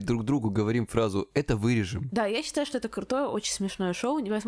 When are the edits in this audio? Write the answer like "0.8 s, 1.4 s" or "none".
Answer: 2.0 s